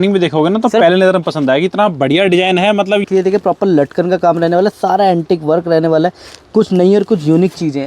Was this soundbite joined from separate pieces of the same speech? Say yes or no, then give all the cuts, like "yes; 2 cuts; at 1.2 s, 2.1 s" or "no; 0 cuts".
yes; 1 cut; at 3.1 s